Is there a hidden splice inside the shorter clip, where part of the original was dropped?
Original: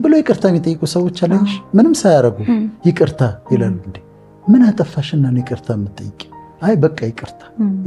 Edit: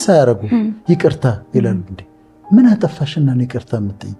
no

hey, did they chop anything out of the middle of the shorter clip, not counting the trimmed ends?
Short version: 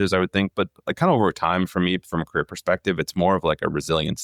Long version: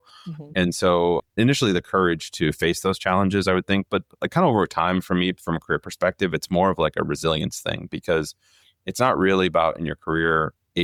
no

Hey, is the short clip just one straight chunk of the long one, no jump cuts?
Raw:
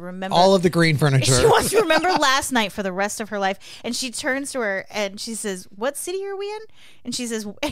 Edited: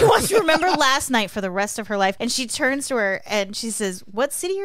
no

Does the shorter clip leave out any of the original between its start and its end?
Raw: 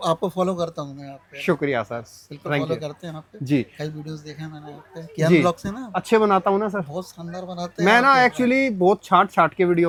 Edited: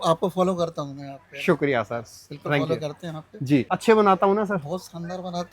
yes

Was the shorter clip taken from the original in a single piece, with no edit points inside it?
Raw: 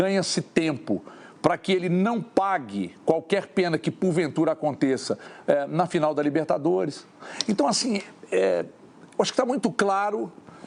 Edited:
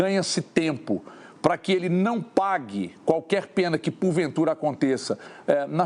yes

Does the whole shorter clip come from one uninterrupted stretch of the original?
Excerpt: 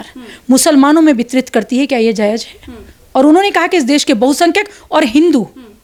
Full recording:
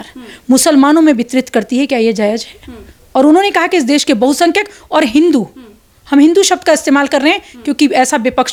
yes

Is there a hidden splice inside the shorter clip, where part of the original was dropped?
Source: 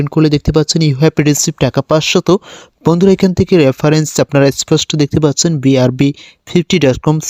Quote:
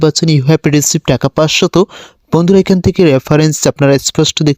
no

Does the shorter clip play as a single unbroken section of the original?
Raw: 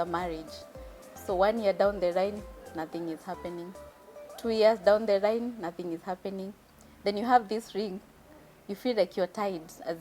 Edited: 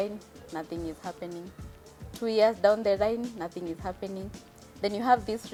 yes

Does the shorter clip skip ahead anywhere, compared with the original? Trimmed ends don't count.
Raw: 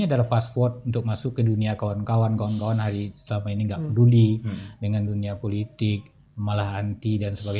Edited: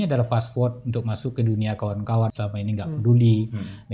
yes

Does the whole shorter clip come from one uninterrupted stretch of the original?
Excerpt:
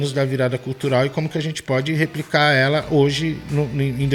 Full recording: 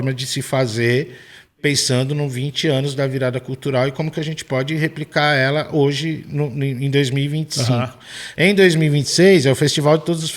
yes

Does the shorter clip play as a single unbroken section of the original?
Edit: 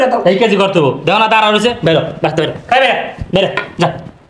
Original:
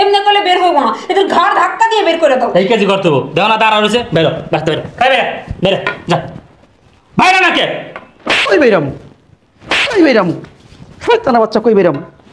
yes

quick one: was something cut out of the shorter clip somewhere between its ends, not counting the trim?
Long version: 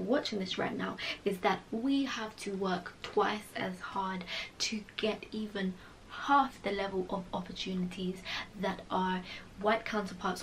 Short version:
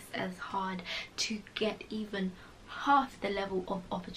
no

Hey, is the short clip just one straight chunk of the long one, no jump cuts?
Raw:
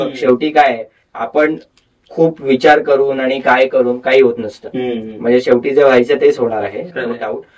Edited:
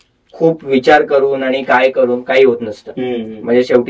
yes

